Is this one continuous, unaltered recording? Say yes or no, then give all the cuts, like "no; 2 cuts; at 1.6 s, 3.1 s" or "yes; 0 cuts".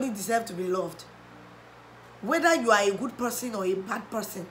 yes; 0 cuts